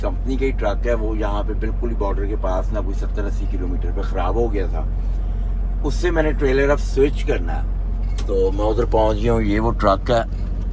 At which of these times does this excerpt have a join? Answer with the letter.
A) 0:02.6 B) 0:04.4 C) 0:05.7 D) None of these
D